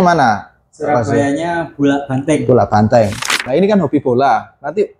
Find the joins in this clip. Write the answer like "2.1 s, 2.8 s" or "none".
3.4 s